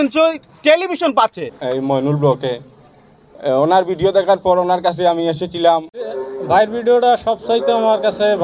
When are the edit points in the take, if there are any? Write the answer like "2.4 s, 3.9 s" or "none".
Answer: 1.6 s, 5.9 s